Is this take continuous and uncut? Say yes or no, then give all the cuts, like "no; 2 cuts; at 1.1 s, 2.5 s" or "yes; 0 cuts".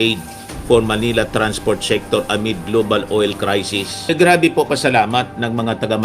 no; 1 cut; at 4.1 s